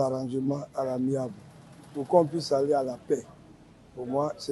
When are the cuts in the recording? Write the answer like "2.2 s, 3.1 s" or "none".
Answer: none